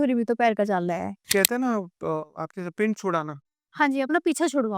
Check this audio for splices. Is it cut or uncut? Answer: cut